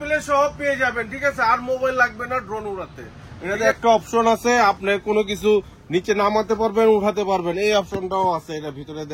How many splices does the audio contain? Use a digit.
1